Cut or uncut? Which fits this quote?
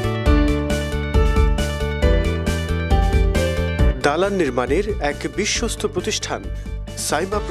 uncut